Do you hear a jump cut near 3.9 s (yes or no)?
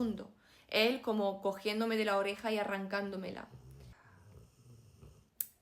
yes